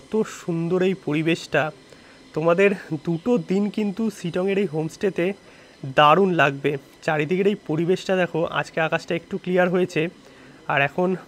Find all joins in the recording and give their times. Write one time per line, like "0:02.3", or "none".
none